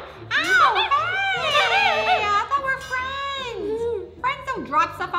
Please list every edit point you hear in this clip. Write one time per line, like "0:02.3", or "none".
0:04.1